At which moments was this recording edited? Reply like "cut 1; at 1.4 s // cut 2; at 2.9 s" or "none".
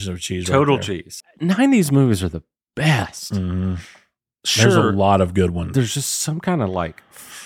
cut 1; at 1.1 s // cut 2; at 5.6 s